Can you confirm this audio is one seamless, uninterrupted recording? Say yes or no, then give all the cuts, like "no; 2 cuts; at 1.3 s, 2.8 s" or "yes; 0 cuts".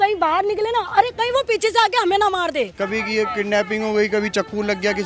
no; 1 cut; at 2.8 s